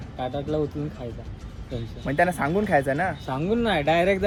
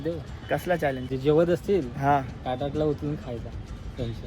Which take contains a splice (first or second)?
second